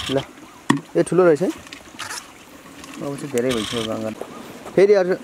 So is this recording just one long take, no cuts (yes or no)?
no